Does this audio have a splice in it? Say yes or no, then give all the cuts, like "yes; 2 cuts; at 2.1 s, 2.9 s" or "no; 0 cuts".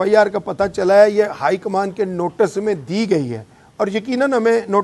no; 0 cuts